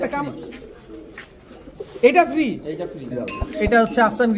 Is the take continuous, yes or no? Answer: no